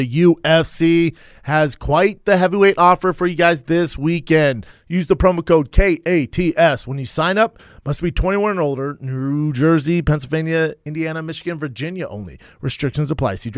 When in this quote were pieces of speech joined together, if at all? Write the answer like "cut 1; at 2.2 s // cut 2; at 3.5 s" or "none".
cut 1; at 4.7 s // cut 2; at 7.7 s

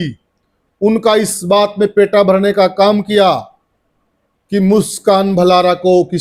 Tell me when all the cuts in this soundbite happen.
none

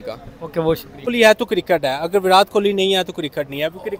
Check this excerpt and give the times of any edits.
cut 1; at 1.1 s

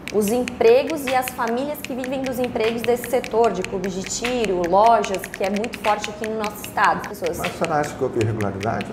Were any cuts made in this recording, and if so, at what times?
cut 1; at 7.1 s

